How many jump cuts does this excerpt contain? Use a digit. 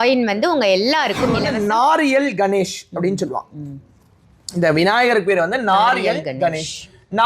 1